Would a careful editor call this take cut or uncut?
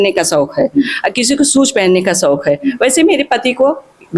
uncut